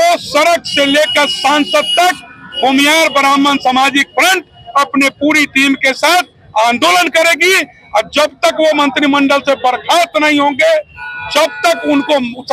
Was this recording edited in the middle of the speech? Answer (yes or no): no